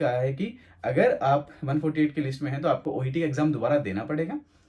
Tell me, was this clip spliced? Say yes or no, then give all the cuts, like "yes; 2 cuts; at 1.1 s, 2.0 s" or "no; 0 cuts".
no; 0 cuts